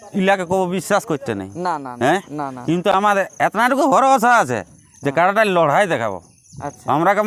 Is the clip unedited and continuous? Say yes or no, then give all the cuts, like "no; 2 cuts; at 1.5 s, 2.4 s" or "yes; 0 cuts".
yes; 0 cuts